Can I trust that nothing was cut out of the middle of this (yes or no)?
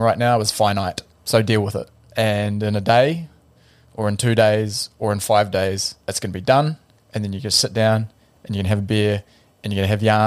no